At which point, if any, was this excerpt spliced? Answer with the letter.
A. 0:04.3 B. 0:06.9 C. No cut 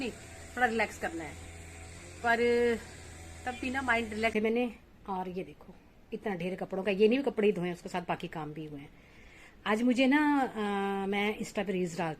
A